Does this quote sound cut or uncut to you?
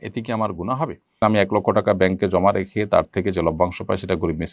cut